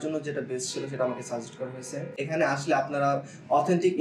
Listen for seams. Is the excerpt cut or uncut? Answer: cut